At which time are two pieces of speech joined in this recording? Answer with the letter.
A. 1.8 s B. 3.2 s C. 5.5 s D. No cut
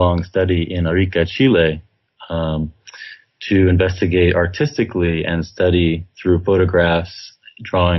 B